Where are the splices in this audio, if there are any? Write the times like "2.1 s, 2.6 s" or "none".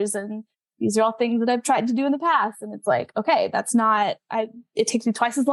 none